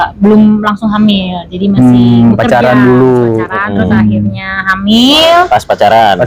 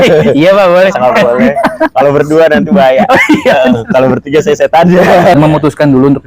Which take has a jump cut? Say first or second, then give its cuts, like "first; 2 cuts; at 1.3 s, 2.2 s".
second; 1 cut; at 5.4 s